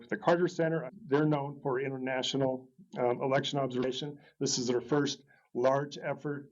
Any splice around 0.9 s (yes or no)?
yes